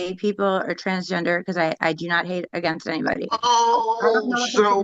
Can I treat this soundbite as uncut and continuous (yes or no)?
yes